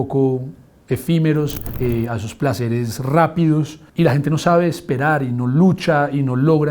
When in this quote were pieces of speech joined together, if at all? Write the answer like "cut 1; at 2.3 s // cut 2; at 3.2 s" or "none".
cut 1; at 1.6 s // cut 2; at 3.8 s